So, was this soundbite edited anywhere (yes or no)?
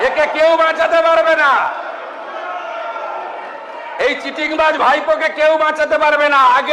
no